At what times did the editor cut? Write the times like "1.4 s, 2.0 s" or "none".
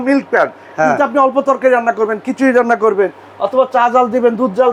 none